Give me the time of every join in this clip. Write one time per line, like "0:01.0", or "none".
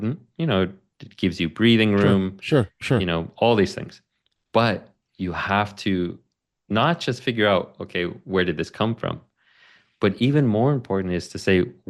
none